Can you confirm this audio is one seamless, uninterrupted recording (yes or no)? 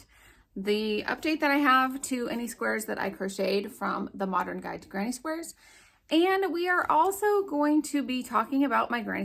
yes